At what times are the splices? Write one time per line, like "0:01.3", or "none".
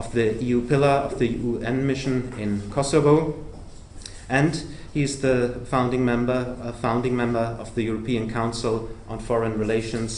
0:05.8